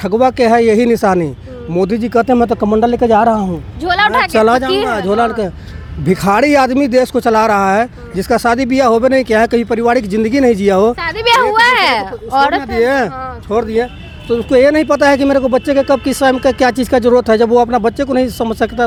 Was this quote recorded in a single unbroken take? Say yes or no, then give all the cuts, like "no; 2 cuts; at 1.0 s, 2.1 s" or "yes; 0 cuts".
yes; 0 cuts